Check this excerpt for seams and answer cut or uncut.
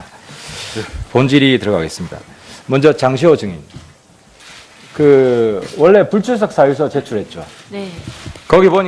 cut